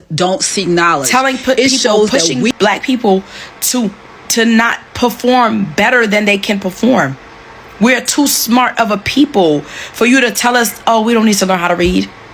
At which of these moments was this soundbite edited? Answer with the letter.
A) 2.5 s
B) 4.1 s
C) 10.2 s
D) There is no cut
A